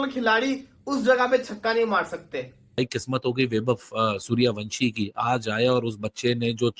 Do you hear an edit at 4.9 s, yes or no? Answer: no